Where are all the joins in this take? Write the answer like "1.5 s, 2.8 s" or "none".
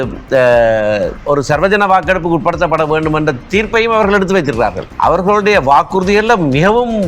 1.1 s, 4.8 s